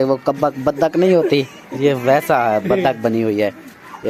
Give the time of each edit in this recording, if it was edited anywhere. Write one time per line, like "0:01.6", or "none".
none